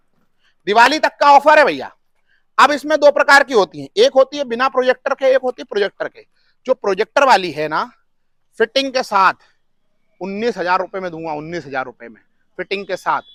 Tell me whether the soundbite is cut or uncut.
uncut